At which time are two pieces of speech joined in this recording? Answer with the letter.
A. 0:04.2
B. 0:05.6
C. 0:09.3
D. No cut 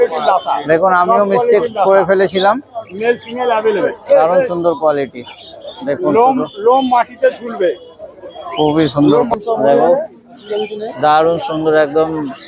C